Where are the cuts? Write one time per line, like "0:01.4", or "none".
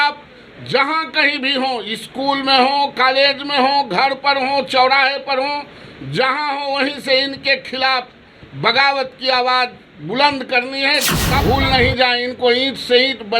0:11.4